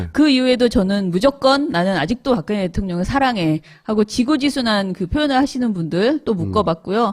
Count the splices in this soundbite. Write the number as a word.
one